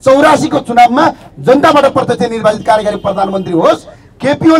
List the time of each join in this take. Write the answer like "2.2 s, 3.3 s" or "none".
none